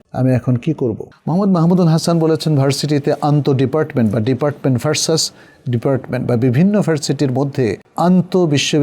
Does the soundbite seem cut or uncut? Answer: cut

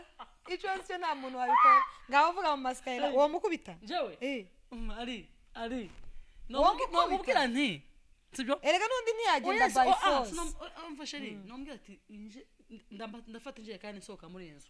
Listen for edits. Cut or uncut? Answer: uncut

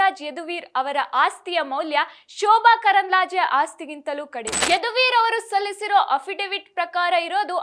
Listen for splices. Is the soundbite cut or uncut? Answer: cut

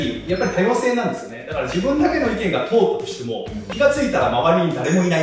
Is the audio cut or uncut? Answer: uncut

